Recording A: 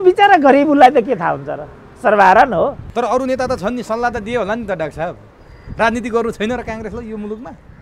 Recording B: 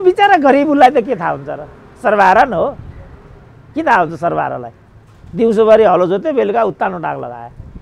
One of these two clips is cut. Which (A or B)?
A